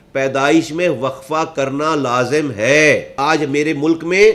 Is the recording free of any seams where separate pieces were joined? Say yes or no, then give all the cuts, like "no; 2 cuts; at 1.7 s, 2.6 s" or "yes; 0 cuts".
no; 1 cut; at 3.1 s